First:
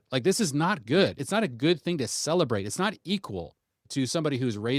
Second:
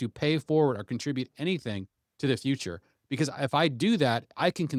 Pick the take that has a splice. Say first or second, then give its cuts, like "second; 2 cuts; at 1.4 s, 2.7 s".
first; 2 cuts; at 1.2 s, 3.9 s